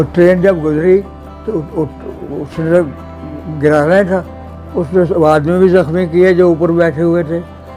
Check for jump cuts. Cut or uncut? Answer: uncut